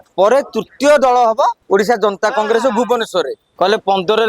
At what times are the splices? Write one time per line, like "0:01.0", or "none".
0:01.6
0:03.4